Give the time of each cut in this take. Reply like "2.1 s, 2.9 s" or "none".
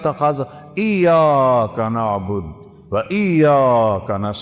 none